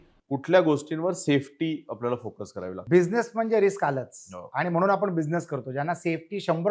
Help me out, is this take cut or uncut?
cut